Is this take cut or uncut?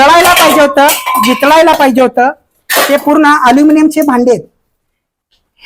uncut